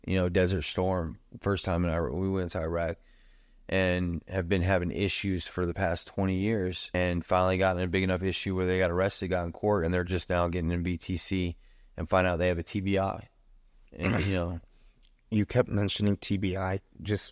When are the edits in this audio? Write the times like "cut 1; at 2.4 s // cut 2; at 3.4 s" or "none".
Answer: cut 1; at 6.9 s

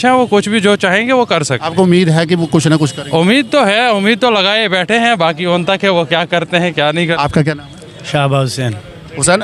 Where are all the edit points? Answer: none

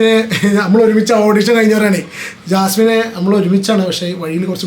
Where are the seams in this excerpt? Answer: none

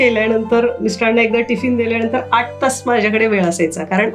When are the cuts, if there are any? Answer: none

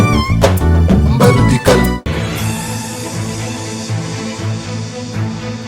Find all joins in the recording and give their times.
cut 1; at 2.0 s

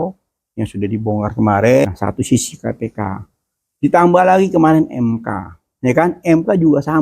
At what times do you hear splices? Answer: cut 1; at 1.9 s

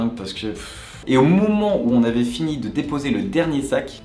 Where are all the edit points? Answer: cut 1; at 0.9 s

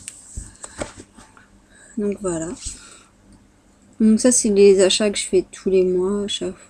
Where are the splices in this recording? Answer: cut 1; at 5.0 s

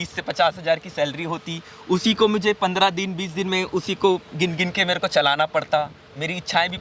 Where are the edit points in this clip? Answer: none

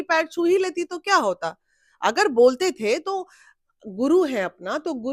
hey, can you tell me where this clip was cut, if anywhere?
none

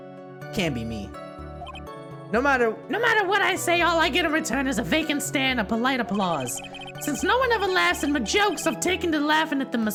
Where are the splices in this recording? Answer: none

